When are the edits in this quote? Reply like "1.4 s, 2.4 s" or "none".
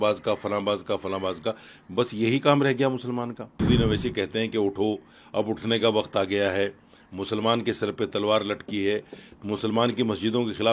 3.6 s